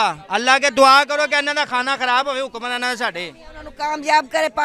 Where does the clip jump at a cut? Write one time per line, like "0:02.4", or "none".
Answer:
none